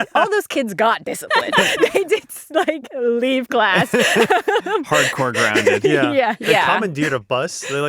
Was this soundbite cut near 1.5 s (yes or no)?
yes